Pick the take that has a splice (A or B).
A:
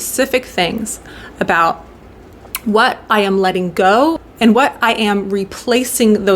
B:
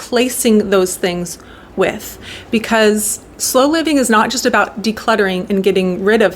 A